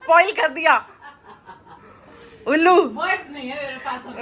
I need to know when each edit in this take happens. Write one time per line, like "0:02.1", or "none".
none